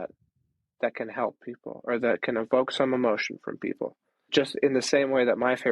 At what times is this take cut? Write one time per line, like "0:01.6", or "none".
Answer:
0:04.3